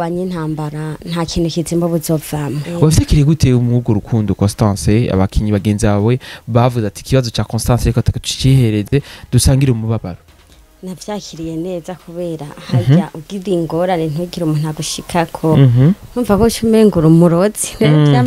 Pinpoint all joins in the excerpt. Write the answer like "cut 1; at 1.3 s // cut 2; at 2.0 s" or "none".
cut 1; at 2.5 s